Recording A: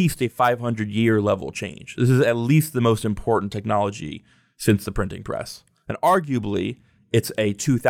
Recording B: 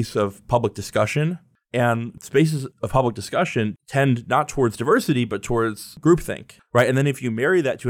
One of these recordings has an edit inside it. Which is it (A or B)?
B